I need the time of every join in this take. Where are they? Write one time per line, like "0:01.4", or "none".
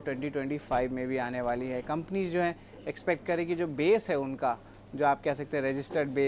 none